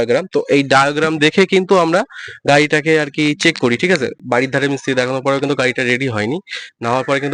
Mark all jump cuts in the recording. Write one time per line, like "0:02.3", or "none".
0:04.1